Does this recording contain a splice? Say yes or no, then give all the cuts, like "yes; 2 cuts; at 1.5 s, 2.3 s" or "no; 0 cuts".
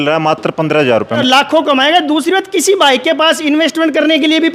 yes; 1 cut; at 1.2 s